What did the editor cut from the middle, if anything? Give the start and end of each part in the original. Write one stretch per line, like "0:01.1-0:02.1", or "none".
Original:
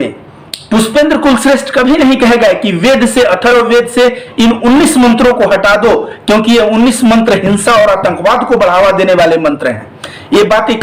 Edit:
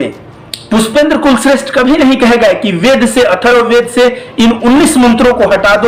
none